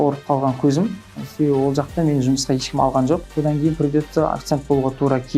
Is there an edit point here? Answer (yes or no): yes